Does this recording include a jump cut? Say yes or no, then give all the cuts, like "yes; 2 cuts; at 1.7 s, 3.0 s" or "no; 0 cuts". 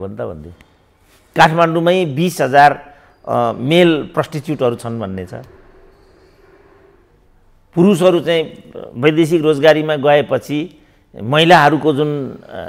yes; 1 cut; at 1.3 s